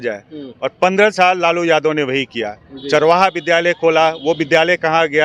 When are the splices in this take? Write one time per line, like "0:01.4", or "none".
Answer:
none

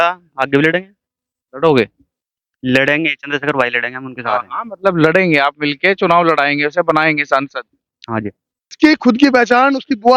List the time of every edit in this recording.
0:08.7

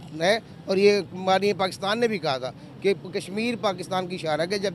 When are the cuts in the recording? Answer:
none

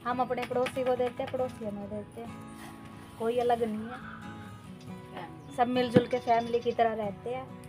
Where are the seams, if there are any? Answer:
0:04.0
0:05.1

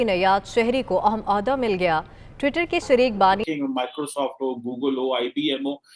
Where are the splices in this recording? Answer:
0:03.4

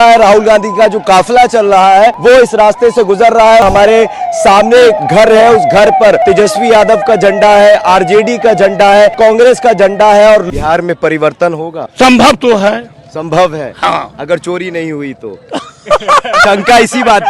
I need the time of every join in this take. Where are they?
0:02.2
0:03.6
0:06.2
0:09.1
0:10.5
0:11.8

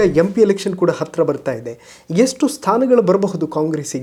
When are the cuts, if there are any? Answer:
none

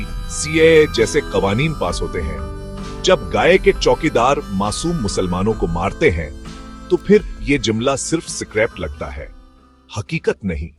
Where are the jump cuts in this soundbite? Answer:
none

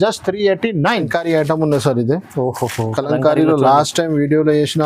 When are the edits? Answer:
0:01.0

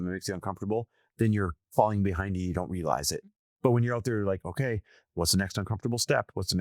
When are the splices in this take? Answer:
0:03.4

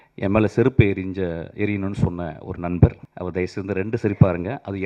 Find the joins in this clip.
0:03.1

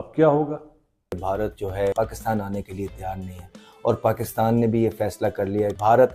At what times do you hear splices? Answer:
0:01.2

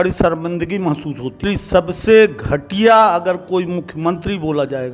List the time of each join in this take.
0:01.4

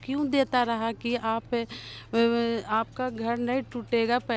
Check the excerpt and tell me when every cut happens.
none

